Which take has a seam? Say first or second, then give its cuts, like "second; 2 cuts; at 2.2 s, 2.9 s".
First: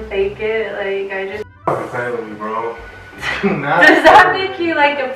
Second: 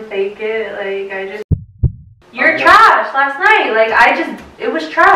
second; 1 cut; at 1.6 s